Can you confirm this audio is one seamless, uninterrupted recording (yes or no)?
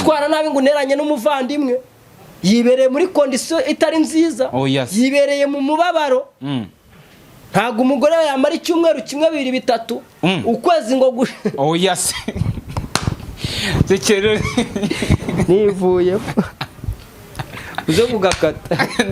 yes